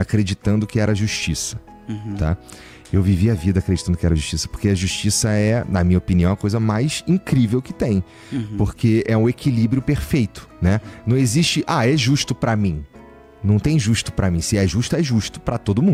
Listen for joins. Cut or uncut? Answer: uncut